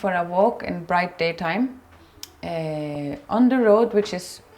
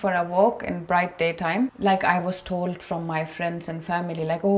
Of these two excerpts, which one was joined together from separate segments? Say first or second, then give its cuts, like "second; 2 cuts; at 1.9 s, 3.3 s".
second; 1 cut; at 1.7 s